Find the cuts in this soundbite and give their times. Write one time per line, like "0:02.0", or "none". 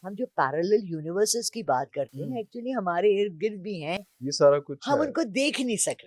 none

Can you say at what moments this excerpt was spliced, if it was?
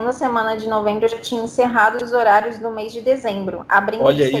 none

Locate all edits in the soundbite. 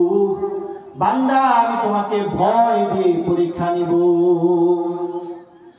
none

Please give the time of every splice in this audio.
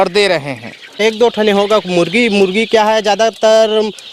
0:01.0

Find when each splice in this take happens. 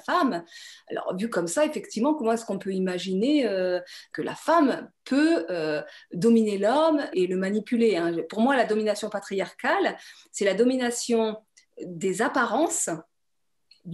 none

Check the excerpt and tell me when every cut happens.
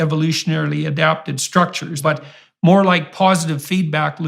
0:01.9

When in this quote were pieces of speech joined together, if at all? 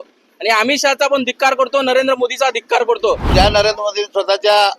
0:03.2

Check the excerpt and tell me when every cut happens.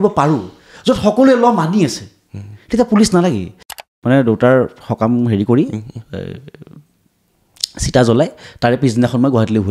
0:03.8

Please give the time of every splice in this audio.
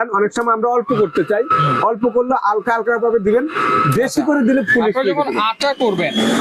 none

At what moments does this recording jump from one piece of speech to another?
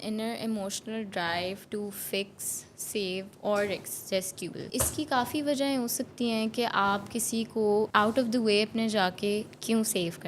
0:04.6
0:07.9

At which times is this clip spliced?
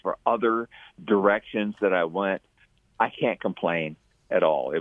none

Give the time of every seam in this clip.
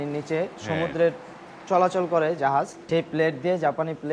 0:02.8

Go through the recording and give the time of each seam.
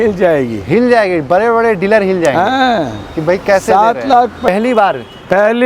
0:04.5

